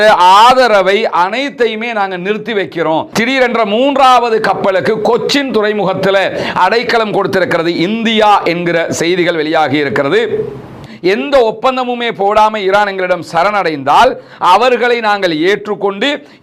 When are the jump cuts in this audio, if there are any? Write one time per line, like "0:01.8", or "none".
0:03.1
0:10.8